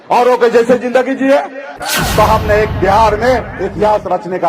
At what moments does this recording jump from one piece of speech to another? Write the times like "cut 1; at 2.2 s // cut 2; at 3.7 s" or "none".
cut 1; at 2.0 s